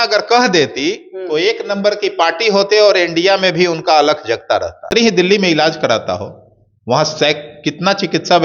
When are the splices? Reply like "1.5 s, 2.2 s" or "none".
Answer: 4.9 s